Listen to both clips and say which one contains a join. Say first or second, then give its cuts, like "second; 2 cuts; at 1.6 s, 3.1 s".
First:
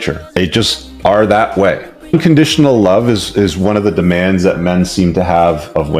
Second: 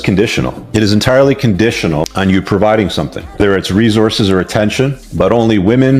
first; 1 cut; at 4.2 s